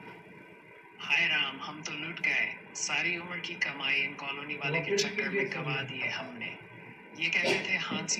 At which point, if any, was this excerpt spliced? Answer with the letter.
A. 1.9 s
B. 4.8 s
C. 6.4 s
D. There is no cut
D